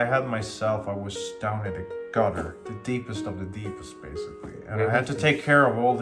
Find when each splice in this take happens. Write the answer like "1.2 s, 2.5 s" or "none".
none